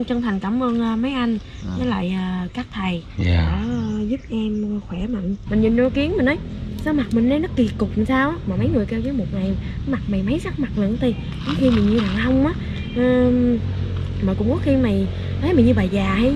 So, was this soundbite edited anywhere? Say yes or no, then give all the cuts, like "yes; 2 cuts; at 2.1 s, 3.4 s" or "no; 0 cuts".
yes; 1 cut; at 5.4 s